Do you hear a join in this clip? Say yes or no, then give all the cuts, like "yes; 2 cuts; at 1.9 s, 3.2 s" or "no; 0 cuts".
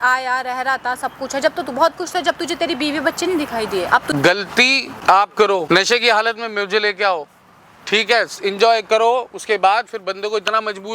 yes; 3 cuts; at 4.1 s, 4.9 s, 5.6 s